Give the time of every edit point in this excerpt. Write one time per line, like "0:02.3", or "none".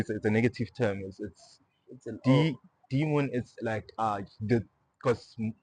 none